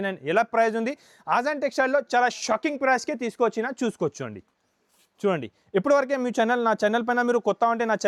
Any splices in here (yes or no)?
no